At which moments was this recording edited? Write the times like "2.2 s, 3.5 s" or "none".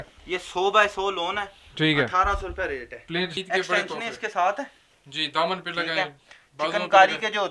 3.4 s